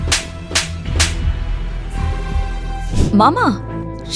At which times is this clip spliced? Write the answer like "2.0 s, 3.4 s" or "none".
2.9 s

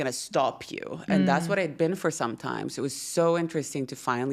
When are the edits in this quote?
none

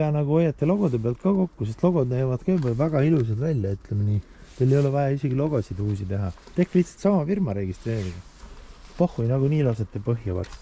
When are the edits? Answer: none

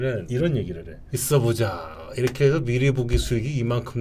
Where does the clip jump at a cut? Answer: none

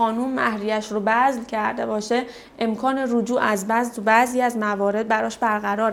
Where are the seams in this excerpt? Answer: none

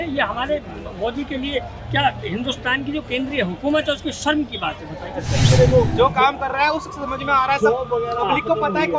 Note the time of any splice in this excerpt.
5.5 s

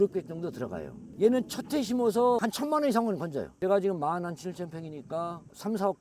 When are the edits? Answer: 0.9 s, 3.6 s

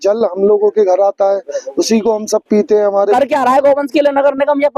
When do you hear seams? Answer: 3.0 s

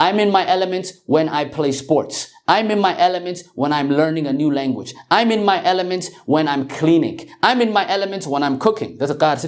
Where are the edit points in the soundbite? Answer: none

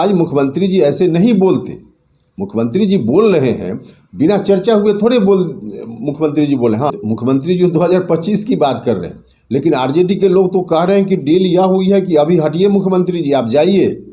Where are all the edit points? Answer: 6.9 s

